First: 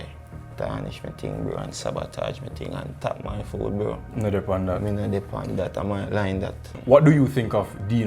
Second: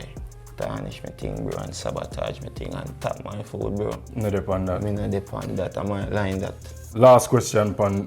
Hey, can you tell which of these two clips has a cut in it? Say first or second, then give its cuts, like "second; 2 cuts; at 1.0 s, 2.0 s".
first; 1 cut; at 6.7 s